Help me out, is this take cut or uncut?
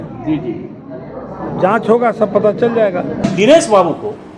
cut